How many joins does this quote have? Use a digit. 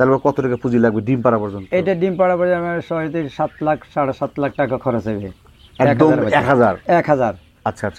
0